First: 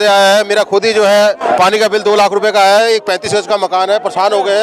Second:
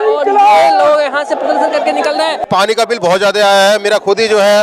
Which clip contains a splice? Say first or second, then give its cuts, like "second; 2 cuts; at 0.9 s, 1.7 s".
second; 1 cut; at 2.4 s